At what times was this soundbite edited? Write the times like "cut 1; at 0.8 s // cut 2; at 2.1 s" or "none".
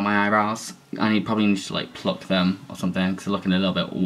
none